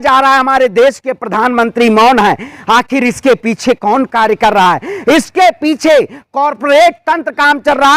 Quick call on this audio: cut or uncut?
uncut